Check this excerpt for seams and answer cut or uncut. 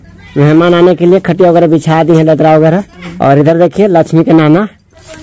uncut